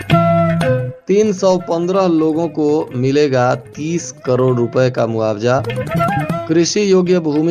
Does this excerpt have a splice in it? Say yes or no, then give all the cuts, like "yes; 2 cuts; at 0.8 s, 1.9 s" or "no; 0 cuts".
yes; 1 cut; at 0.9 s